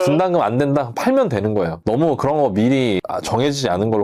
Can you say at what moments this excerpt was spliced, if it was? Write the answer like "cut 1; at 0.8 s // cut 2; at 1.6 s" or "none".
cut 1; at 1.8 s